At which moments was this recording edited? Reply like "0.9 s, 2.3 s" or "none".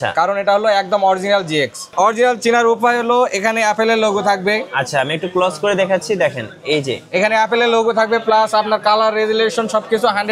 1.9 s